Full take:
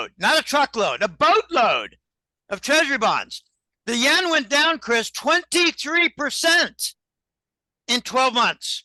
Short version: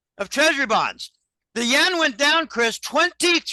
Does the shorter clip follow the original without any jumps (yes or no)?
yes